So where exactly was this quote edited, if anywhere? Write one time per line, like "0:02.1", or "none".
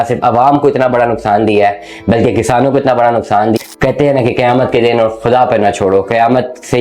0:03.6